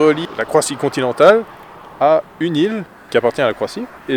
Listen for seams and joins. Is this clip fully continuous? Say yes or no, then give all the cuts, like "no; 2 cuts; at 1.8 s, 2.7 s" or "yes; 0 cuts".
no; 1 cut; at 2.9 s